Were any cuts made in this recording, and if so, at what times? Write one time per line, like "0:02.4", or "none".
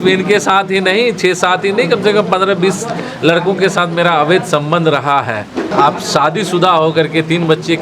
0:05.7